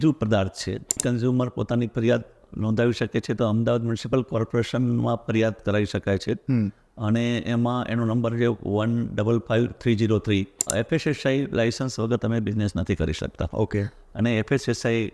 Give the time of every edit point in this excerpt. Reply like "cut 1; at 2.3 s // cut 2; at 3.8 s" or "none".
cut 1; at 1.0 s // cut 2; at 3.4 s // cut 3; at 10.7 s